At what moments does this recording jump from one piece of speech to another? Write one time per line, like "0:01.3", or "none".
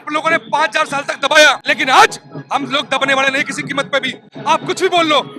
0:01.7